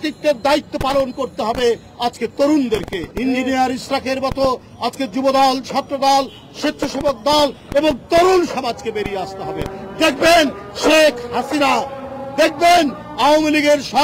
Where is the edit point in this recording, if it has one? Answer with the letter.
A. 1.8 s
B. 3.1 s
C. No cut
B